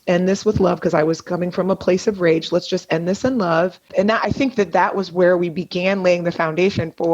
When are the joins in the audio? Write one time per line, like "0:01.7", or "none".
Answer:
0:03.9